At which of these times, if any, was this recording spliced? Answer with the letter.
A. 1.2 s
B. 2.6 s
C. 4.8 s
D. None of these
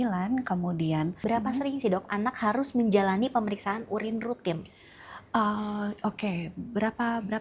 A